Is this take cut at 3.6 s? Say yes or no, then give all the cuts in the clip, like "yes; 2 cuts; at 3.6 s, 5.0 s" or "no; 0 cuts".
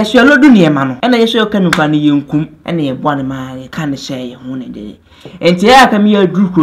yes; 3 cuts; at 0.9 s, 2.6 s, 3.6 s